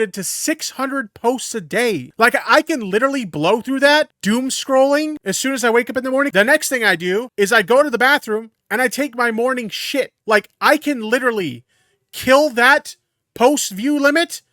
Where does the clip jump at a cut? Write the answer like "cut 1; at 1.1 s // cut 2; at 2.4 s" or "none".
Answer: cut 1; at 2.1 s // cut 2; at 4.2 s // cut 3; at 5.2 s // cut 4; at 6.3 s // cut 5; at 7.3 s // cut 6; at 10.2 s